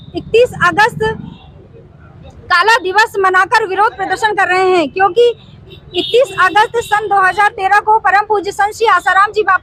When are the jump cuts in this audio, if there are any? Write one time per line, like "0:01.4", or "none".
none